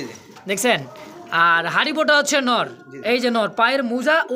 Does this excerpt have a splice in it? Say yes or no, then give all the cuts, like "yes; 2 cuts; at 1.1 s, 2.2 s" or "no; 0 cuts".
no; 0 cuts